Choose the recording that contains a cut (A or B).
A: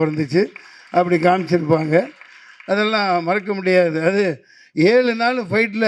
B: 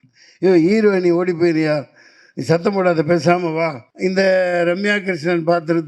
B